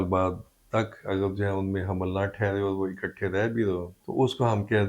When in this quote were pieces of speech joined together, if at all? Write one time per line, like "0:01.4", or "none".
0:04.0